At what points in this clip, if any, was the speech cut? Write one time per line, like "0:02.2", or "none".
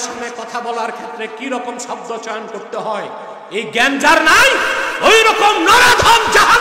none